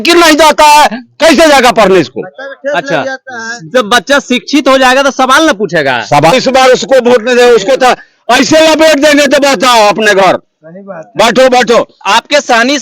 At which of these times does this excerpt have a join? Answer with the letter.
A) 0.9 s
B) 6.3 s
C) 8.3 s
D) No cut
B